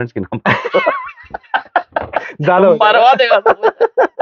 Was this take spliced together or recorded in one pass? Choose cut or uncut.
uncut